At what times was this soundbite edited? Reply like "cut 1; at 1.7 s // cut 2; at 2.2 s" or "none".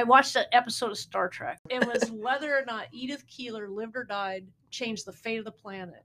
cut 1; at 1.7 s